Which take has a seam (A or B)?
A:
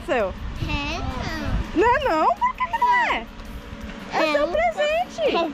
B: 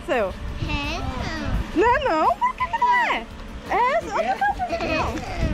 B